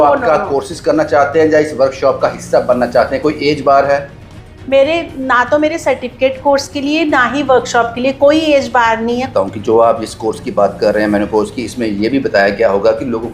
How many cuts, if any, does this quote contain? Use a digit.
1